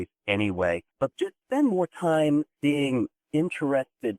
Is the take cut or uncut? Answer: cut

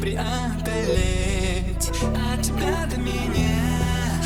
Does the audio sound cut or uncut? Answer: uncut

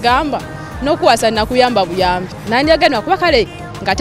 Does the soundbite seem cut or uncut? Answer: cut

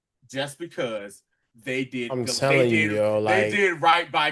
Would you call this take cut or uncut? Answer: uncut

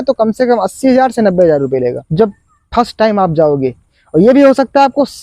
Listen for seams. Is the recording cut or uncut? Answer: cut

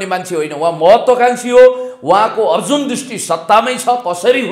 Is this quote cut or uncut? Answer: uncut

